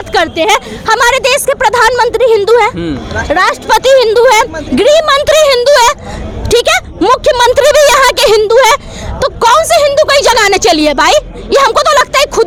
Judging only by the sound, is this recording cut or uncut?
uncut